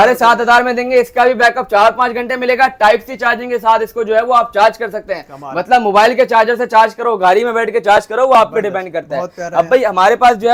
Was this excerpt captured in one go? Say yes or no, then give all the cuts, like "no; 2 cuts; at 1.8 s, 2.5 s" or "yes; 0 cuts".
yes; 0 cuts